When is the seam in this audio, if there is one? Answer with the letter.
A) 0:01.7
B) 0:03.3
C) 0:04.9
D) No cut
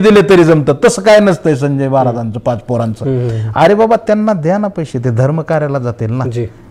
D